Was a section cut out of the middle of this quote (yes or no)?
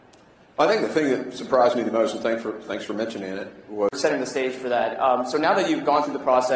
no